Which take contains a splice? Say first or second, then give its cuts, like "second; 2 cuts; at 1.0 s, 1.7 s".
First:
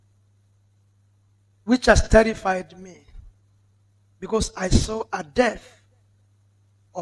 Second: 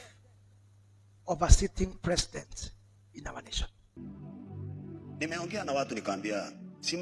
second; 1 cut; at 3.9 s